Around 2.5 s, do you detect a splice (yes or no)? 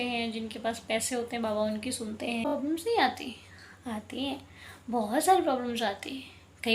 yes